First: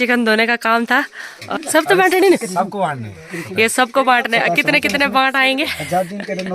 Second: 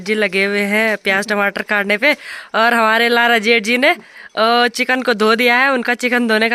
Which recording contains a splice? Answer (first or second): first